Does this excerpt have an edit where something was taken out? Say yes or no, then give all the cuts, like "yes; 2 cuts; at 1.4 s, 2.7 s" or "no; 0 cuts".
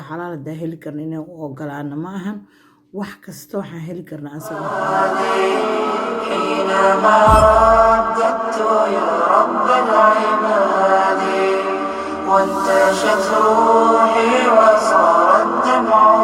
yes; 1 cut; at 4.5 s